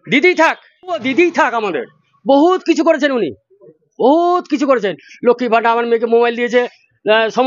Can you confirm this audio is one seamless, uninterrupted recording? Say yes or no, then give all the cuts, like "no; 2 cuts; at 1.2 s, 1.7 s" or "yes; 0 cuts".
no; 1 cut; at 1.1 s